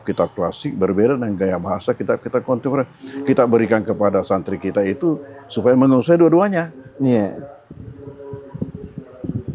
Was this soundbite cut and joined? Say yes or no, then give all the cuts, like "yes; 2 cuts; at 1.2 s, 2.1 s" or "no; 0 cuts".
no; 0 cuts